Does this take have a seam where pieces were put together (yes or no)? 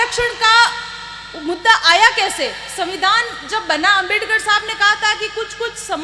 no